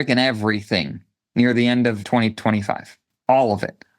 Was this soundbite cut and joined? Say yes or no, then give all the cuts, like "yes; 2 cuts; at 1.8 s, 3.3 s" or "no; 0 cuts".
yes; 1 cut; at 2.0 s